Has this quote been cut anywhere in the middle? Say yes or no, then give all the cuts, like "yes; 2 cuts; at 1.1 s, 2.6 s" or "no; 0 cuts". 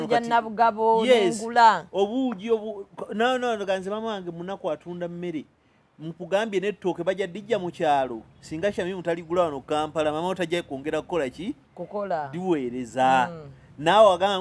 no; 0 cuts